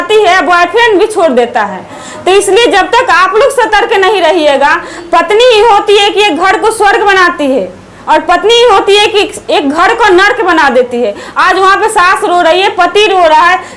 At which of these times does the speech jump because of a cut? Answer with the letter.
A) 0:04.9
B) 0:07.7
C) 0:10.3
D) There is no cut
D